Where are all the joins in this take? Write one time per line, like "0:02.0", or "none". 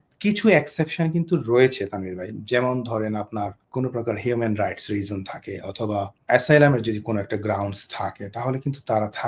0:03.6
0:06.2